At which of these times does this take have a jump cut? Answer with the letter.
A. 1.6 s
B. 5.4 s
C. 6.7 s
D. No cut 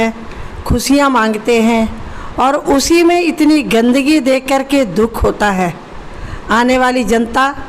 D